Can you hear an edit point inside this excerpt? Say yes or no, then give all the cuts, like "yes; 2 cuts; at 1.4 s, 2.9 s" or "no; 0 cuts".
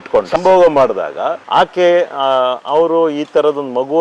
yes; 1 cut; at 1.4 s